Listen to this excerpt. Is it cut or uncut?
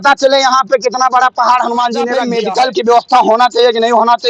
cut